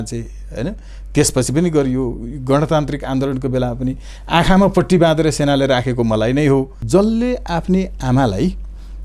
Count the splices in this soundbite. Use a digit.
1